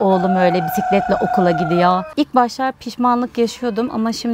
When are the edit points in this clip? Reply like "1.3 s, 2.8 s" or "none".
2.1 s